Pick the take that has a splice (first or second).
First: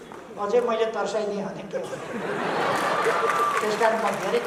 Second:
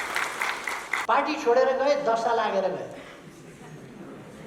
second